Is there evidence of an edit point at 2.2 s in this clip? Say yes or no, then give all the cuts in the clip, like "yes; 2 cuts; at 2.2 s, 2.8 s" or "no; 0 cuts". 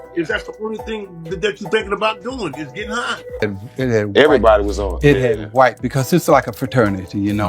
no; 1 cut; at 3.4 s